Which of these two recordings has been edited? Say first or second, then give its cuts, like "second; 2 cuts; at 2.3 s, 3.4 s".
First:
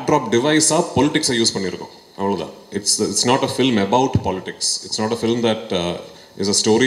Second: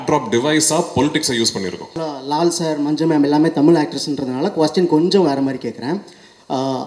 second; 1 cut; at 1.9 s